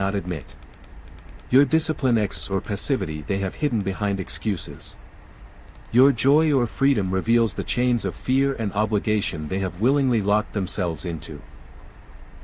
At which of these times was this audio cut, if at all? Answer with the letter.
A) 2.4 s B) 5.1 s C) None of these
A